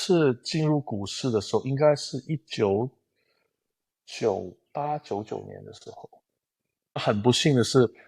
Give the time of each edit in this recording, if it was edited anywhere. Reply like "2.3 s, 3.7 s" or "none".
7.0 s